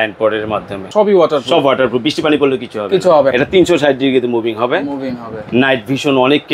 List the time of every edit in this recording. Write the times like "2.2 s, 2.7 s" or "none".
0.9 s, 3.3 s